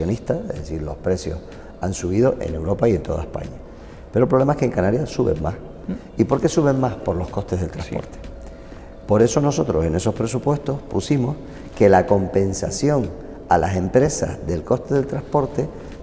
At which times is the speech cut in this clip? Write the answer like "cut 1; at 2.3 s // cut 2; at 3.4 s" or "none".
none

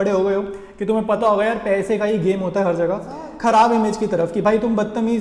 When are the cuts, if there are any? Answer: cut 1; at 3.3 s

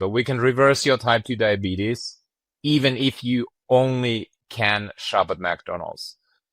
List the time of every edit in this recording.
cut 1; at 2.5 s

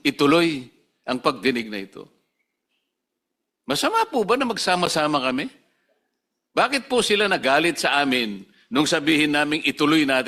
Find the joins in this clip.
none

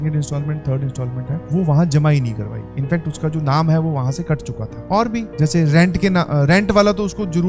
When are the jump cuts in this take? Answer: none

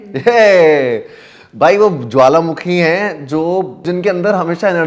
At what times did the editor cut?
cut 1; at 3.8 s

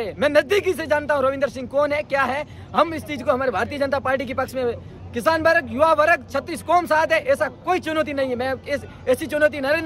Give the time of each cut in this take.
none

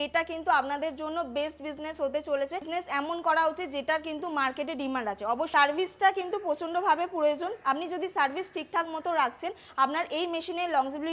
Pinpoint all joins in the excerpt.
cut 1; at 2.7 s // cut 2; at 5.5 s

